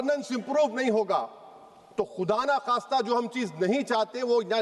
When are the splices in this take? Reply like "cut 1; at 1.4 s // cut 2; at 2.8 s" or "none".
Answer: none